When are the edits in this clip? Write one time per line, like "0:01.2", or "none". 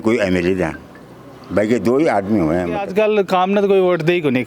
0:02.8